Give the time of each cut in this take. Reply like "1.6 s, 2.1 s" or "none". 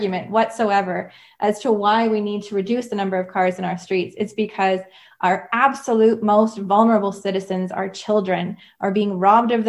none